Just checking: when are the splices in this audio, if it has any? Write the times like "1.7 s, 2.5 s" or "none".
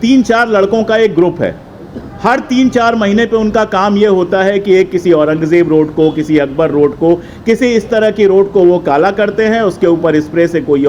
none